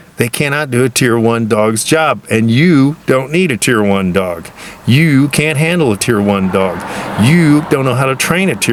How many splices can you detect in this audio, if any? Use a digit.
0